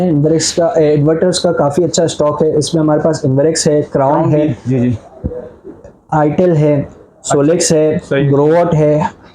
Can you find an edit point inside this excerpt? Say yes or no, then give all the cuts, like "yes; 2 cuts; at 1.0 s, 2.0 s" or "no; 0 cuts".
no; 0 cuts